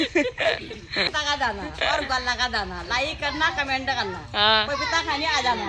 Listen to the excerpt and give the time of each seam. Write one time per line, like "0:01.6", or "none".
0:01.1